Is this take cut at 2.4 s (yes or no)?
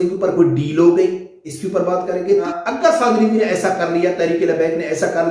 yes